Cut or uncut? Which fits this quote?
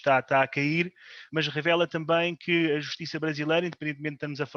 uncut